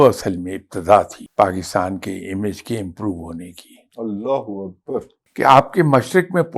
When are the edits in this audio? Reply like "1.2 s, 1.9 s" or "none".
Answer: 1.2 s, 5.2 s